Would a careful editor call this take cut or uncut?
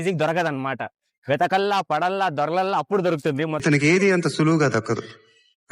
cut